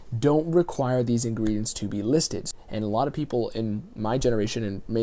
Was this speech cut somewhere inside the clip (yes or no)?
yes